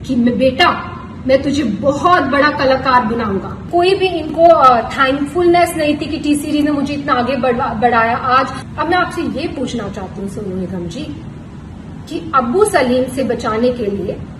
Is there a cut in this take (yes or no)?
yes